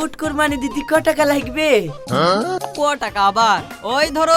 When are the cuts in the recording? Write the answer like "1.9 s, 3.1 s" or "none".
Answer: none